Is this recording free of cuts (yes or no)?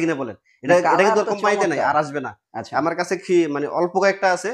yes